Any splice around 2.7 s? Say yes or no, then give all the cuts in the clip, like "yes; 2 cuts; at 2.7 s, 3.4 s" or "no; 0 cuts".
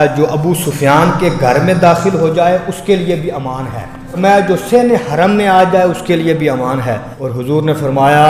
no; 2 cuts; at 4.2 s, 7.1 s